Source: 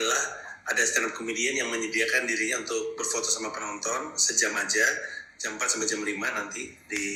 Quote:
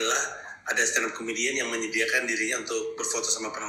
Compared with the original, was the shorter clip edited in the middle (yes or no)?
no